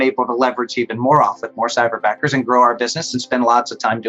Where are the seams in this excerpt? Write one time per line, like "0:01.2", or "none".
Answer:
none